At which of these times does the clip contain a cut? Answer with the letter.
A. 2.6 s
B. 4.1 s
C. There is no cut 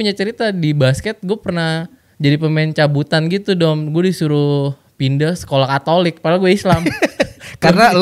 C